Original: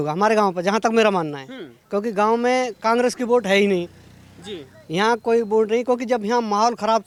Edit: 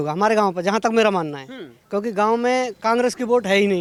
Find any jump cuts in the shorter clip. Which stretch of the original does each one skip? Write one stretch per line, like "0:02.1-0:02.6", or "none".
none

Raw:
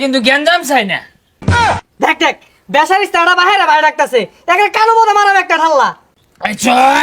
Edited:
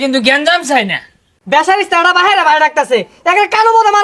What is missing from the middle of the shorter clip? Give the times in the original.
0:01.3-0:02.5

